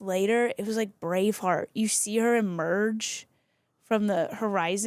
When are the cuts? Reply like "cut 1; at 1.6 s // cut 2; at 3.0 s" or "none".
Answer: none